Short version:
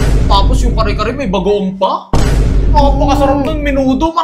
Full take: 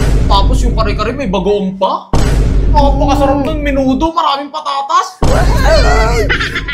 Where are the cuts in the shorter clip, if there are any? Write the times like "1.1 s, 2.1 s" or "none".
none

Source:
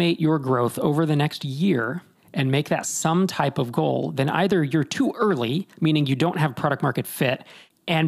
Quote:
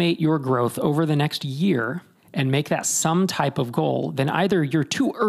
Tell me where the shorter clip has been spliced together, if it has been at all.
none

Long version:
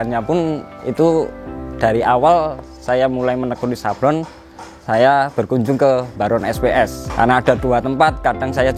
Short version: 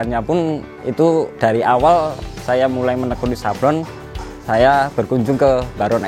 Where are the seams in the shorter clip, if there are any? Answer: 1.3 s

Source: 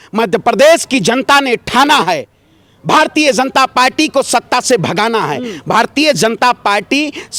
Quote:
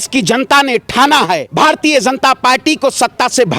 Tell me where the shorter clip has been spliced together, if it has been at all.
1.5 s

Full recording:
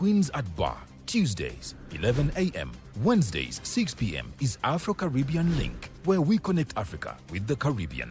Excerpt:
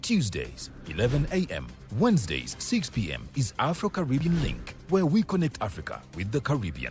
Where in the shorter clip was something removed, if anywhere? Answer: 4.2 s

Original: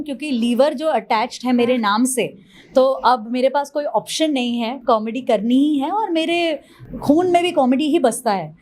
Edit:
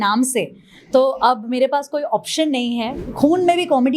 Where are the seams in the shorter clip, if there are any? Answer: 2.9 s

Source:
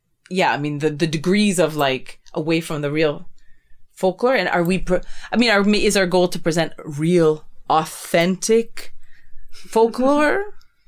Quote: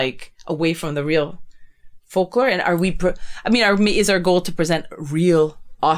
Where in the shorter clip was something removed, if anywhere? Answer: none

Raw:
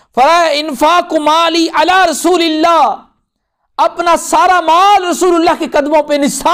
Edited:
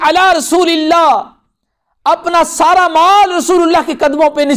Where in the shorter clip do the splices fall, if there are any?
none

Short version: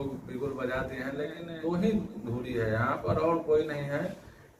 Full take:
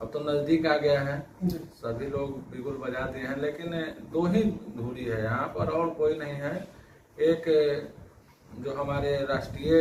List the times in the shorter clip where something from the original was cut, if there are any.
1.4 s

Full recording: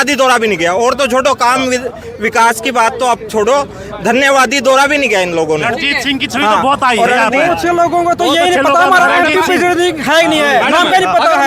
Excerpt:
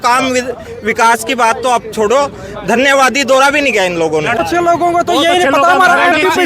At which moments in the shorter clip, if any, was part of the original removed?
4.4 s

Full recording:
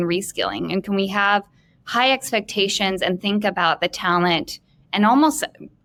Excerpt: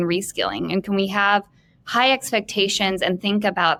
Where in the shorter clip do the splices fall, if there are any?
none

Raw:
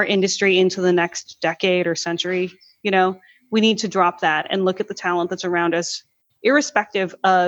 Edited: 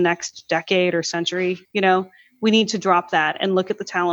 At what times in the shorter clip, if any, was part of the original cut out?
1.6 s

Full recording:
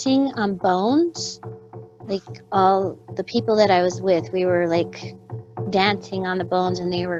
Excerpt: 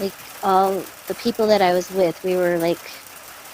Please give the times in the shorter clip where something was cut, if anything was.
none

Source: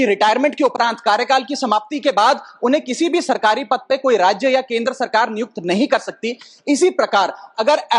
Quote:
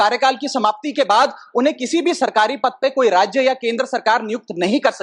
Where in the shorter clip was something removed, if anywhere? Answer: none

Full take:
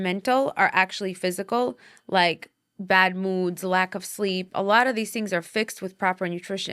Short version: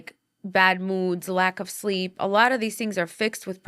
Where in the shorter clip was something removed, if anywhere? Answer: none

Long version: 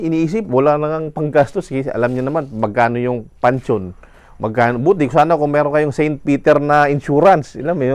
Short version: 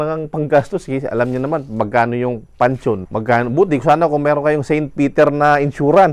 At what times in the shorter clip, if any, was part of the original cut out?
3.1 s

